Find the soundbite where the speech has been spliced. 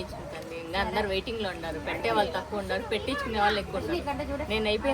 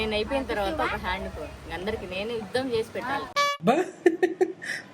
second; 1 cut; at 3.3 s

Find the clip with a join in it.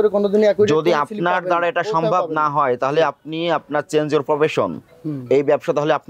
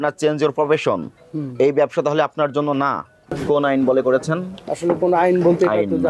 second; 1 cut; at 3.4 s

